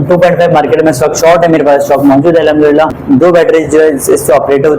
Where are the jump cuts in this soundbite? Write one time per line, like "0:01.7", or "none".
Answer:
0:03.0